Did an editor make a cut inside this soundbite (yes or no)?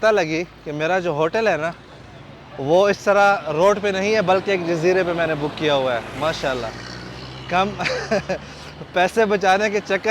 no